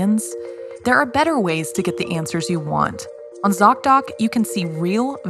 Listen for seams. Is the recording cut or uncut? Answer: cut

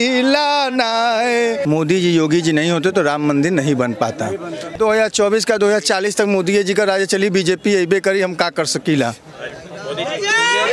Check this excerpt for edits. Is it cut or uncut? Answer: cut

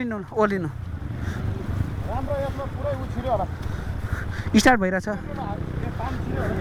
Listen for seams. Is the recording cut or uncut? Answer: uncut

